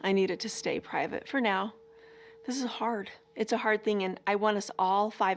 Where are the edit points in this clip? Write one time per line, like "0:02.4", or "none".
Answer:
none